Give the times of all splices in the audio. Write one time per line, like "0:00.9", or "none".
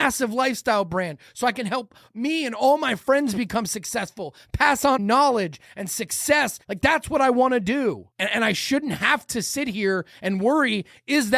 0:05.0
0:06.6
0:08.1